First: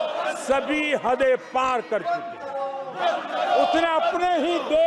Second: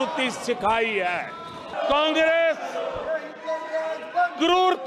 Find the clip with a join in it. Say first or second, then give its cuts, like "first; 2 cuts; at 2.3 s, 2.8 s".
second; 1 cut; at 1.8 s